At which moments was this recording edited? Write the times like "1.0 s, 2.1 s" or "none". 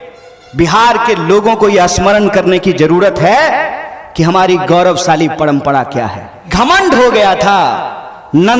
6.5 s

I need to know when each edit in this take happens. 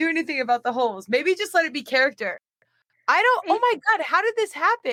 none

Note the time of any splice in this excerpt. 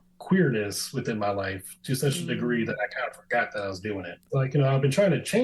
4.2 s

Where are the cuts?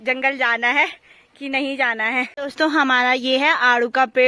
2.3 s

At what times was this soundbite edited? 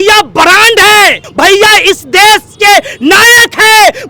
1.2 s

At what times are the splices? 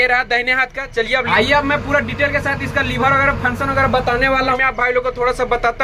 none

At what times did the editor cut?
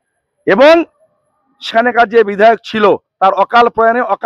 1.7 s

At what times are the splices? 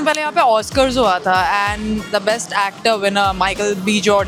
none

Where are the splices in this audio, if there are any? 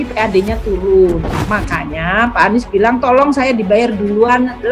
none

